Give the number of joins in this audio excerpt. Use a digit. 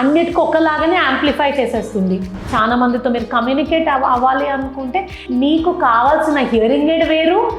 1